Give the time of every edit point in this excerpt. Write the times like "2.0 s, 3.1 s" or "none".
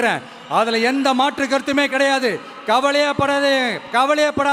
none